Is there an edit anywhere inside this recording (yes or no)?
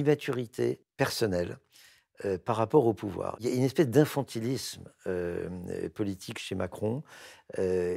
yes